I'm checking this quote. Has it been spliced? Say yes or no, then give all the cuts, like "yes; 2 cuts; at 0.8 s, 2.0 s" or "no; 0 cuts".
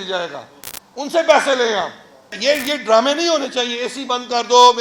yes; 1 cut; at 2.4 s